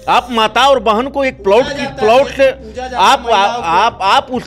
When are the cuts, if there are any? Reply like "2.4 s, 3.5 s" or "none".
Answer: none